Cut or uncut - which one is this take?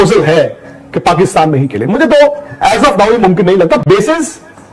uncut